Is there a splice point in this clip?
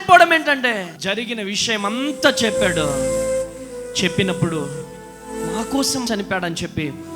yes; 2 cuts; at 0.9 s, 6.0 s

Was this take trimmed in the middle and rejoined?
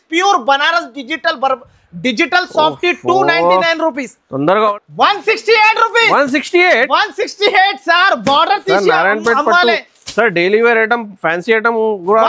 yes; 1 cut; at 4.7 s

